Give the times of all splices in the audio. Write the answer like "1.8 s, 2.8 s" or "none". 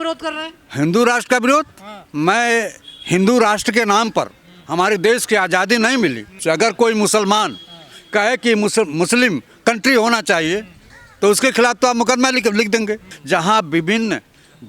6.4 s, 13.1 s